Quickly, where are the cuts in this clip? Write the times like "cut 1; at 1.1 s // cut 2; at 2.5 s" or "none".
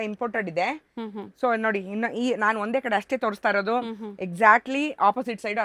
none